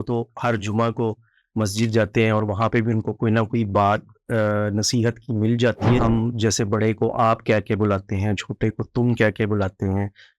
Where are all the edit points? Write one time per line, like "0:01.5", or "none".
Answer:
0:06.0